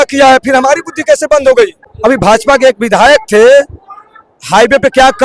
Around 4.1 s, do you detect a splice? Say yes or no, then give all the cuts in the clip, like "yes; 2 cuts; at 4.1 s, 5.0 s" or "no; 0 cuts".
no; 1 cut; at 1.8 s